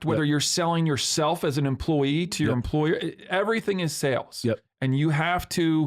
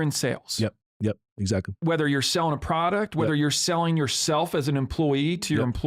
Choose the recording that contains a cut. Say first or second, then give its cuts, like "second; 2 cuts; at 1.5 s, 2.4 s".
second; 1 cut; at 1.7 s